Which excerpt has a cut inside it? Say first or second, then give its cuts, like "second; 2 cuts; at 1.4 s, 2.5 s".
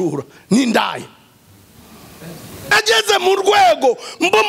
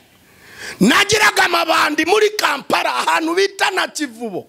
first; 1 cut; at 2.7 s